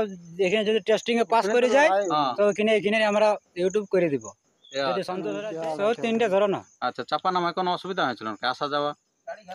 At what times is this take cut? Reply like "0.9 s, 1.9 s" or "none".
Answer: 5.4 s